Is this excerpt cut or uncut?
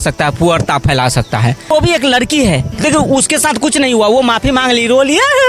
cut